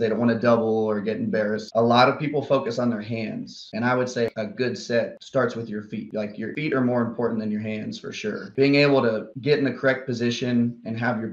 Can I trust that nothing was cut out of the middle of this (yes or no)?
no